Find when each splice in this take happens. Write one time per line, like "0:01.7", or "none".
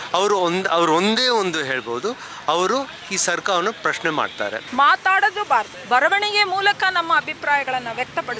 0:04.6
0:05.8